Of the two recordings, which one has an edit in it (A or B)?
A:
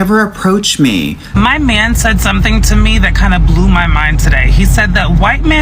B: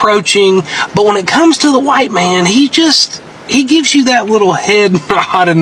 A